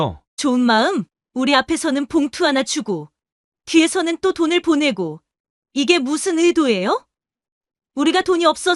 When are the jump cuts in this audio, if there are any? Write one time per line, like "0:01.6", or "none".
none